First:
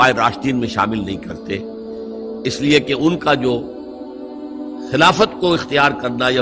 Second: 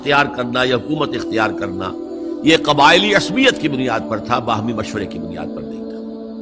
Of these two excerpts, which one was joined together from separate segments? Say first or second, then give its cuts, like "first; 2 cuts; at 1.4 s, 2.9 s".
second; 1 cut; at 5.2 s